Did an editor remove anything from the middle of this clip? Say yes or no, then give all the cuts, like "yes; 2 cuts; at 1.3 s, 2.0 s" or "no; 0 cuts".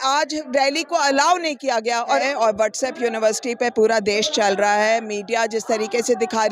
yes; 1 cut; at 2.2 s